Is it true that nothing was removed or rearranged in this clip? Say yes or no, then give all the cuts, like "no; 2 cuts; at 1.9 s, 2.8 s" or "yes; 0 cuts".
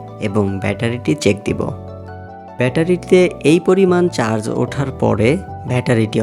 no; 1 cut; at 2.4 s